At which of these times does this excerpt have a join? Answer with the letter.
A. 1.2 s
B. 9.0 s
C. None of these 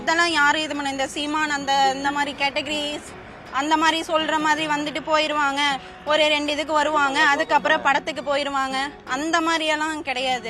C